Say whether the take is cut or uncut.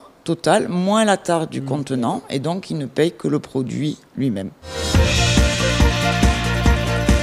uncut